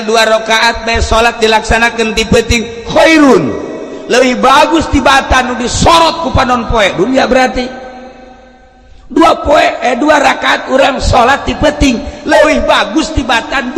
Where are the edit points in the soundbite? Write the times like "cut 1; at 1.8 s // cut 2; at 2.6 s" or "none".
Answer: none

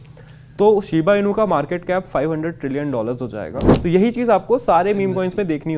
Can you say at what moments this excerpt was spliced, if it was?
cut 1; at 3.7 s

